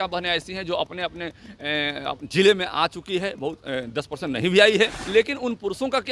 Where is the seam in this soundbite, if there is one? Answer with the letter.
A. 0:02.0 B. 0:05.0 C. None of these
B